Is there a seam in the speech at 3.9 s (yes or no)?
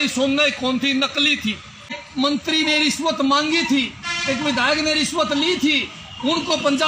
no